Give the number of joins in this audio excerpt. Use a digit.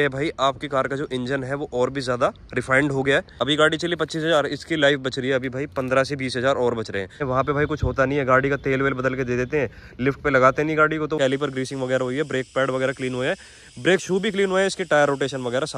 3